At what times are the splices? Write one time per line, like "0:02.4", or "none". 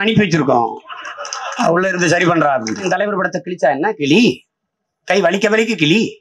0:02.8